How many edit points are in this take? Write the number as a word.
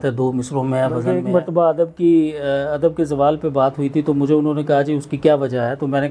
one